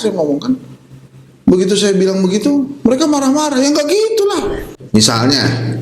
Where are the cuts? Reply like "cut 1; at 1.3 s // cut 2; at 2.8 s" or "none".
cut 1; at 4.7 s